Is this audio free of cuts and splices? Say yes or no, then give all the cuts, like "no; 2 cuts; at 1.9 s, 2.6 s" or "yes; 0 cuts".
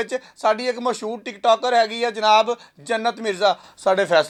yes; 0 cuts